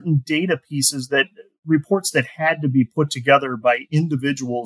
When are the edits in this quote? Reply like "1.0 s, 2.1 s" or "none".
none